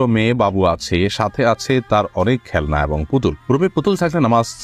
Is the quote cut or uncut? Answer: uncut